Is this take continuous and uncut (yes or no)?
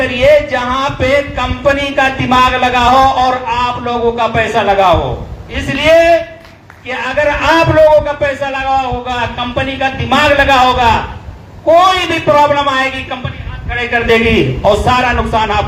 yes